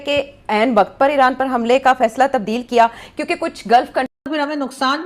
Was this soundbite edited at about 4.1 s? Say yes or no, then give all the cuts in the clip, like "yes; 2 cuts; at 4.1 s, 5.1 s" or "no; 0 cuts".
yes; 1 cut; at 4.1 s